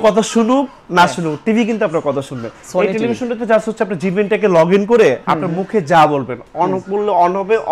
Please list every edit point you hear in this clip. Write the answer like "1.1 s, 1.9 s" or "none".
none